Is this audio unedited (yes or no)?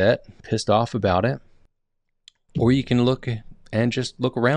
yes